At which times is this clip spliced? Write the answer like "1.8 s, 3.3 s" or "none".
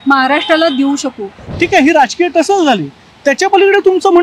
1.4 s